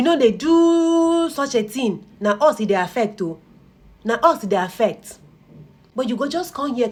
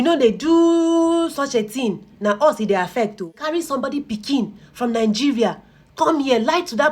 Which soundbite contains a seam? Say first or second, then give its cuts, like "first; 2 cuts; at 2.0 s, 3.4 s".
second; 1 cut; at 3.4 s